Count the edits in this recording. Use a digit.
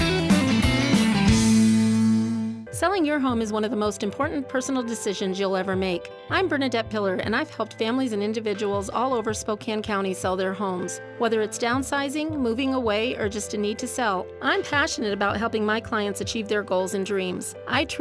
1